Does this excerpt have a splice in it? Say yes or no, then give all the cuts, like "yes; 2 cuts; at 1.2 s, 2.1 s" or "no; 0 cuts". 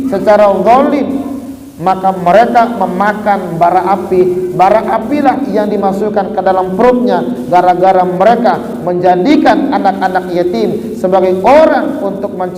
no; 0 cuts